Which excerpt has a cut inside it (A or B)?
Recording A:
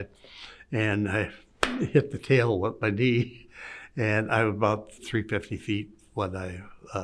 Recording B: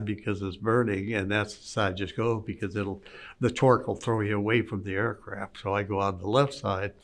A